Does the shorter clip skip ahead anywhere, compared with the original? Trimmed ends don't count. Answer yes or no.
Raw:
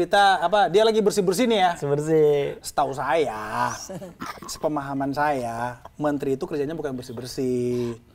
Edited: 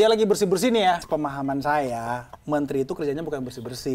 yes